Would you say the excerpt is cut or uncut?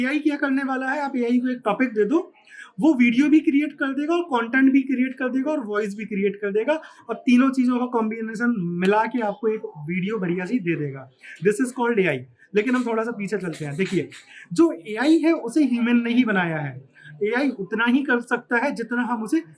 uncut